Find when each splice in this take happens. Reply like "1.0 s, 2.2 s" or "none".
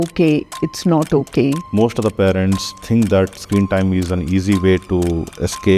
1.6 s